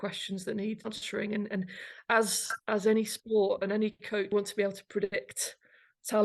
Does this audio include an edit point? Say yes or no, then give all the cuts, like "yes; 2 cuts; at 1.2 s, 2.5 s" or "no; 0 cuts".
yes; 2 cuts; at 0.9 s, 4.3 s